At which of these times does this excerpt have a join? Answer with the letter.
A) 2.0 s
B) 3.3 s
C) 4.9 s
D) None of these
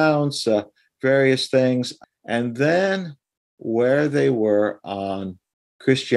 A